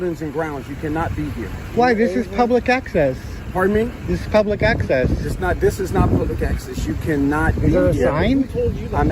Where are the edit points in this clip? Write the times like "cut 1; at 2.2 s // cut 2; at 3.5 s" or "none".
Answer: none